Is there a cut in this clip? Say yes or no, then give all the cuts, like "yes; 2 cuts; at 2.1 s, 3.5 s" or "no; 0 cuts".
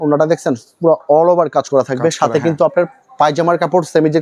no; 0 cuts